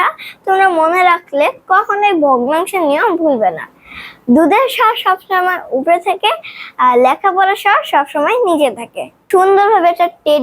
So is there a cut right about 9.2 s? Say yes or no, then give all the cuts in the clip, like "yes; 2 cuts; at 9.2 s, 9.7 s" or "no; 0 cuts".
yes; 1 cut; at 9.2 s